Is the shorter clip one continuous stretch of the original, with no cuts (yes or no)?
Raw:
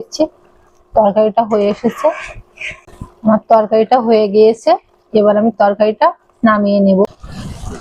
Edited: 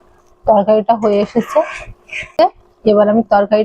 no